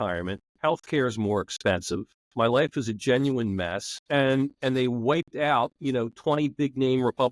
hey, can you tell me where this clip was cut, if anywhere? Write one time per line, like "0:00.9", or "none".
0:02.2
0:03.9
0:04.6